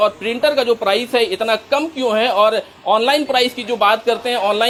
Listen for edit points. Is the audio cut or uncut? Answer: uncut